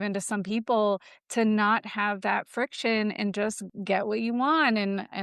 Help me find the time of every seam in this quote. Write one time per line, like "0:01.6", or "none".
0:03.7